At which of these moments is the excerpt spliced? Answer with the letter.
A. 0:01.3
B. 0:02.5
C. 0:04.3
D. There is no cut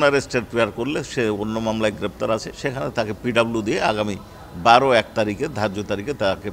B